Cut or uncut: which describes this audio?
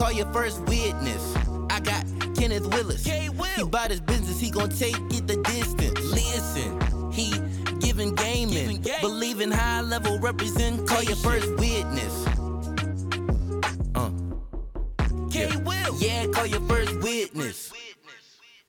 uncut